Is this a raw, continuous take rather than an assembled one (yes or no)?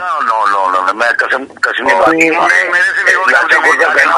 no